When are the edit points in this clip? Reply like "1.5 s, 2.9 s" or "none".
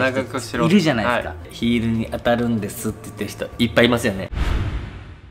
4.3 s